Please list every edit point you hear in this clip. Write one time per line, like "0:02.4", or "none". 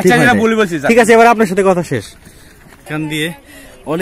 0:02.8